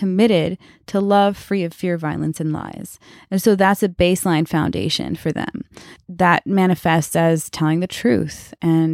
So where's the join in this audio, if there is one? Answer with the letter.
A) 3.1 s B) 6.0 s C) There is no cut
B